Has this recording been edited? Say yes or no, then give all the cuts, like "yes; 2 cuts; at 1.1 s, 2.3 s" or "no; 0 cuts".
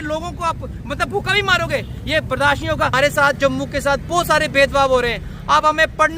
yes; 1 cut; at 2.9 s